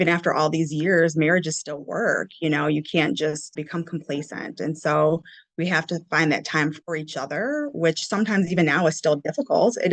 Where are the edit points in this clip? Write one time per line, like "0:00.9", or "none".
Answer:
0:03.5
0:06.8